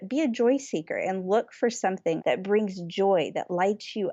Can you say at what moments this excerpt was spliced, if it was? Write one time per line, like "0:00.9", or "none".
0:02.2